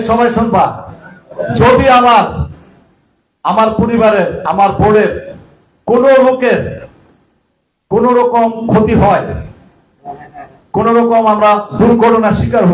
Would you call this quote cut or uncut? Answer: uncut